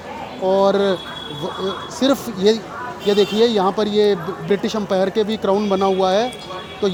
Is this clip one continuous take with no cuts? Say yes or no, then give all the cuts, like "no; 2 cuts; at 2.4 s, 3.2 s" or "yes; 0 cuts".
yes; 0 cuts